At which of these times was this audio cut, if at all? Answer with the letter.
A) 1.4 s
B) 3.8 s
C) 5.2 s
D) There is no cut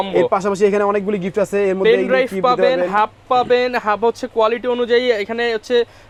D